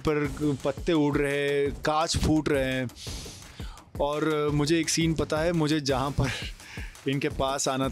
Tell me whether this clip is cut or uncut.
uncut